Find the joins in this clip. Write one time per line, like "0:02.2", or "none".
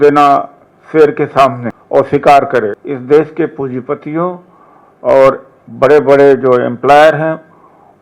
0:01.7
0:02.9